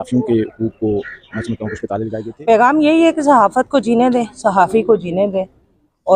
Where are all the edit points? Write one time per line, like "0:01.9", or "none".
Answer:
0:02.3